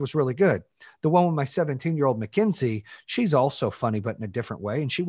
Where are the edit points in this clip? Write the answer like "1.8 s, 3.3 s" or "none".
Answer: none